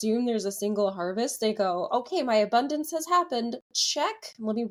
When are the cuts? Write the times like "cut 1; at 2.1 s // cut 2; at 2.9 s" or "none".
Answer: none